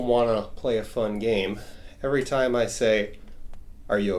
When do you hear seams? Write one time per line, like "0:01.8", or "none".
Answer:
none